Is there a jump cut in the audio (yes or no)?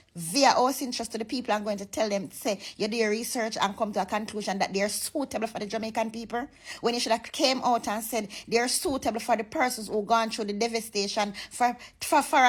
no